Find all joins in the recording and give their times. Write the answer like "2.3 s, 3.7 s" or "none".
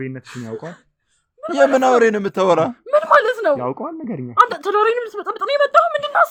none